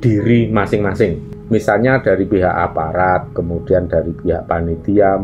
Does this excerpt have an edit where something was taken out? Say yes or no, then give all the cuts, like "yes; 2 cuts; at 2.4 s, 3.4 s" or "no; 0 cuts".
no; 0 cuts